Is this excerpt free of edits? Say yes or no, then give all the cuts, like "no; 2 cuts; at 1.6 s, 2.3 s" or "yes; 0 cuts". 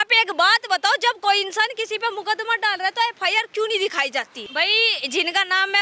no; 1 cut; at 4.4 s